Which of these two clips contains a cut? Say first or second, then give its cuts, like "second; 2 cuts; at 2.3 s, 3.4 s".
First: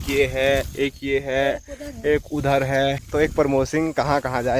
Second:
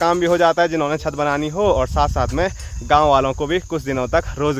first; 1 cut; at 3.0 s